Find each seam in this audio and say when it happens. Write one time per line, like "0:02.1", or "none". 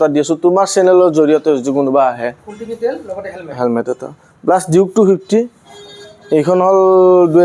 none